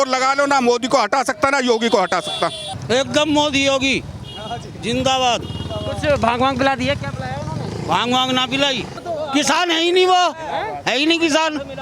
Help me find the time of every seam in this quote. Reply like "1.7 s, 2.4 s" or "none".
2.7 s, 9.0 s